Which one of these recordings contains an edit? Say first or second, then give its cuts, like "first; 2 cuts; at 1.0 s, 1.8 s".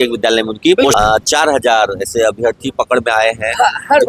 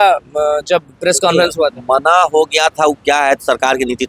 first; 1 cut; at 1.0 s